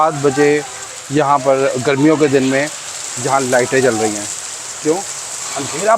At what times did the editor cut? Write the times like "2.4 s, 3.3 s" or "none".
none